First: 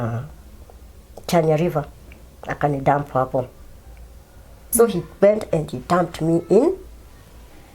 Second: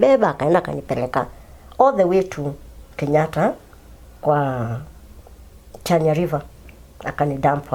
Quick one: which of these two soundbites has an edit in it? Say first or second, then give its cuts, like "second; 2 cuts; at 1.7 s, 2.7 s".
first; 1 cut; at 4.6 s